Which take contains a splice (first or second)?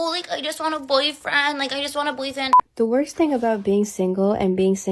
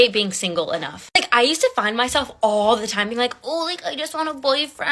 first